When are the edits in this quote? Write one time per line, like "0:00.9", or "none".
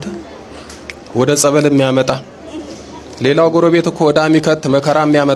none